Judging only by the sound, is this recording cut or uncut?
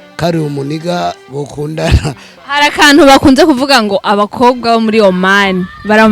cut